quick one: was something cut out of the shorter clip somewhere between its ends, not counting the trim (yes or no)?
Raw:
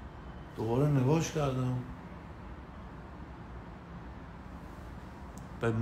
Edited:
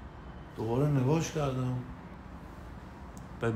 yes